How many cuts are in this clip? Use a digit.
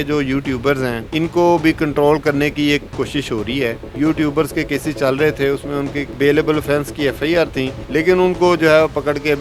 4